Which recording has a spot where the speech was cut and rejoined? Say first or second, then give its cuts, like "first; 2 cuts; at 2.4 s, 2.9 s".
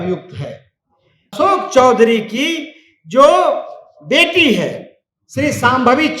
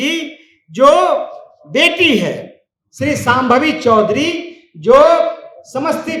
first; 1 cut; at 1.2 s